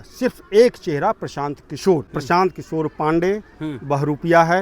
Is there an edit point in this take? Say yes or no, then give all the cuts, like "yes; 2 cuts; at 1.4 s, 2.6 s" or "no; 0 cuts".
yes; 1 cut; at 2.2 s